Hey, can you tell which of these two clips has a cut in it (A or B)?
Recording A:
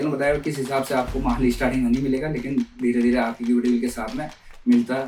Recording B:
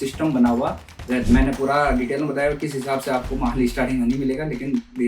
B